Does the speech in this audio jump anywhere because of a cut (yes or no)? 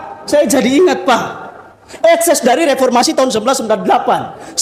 no